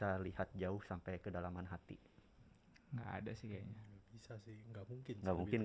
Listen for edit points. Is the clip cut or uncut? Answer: uncut